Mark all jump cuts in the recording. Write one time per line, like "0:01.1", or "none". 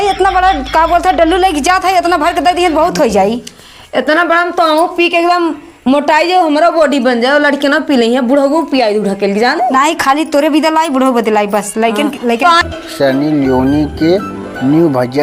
0:12.6